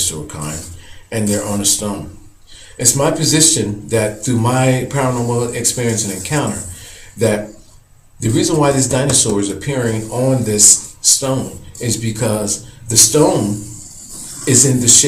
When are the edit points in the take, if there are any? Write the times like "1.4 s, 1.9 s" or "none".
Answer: 3.7 s